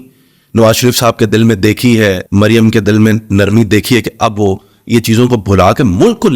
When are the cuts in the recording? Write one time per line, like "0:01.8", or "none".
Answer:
0:02.2